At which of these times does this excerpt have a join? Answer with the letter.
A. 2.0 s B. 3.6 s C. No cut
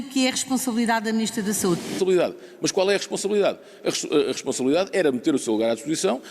A